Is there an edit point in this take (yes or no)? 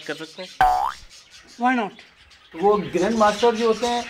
no